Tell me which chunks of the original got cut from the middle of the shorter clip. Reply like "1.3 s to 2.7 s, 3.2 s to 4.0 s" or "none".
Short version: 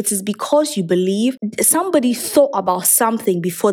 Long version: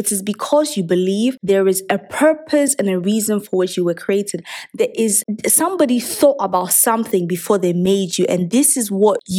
1.4 s to 5.2 s